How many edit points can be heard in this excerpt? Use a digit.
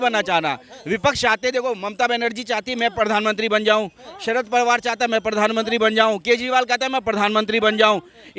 0